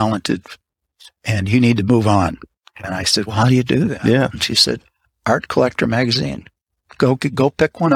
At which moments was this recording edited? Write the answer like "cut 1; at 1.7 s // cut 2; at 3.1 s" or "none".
none